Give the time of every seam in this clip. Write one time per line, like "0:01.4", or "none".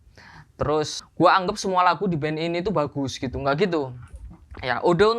0:01.0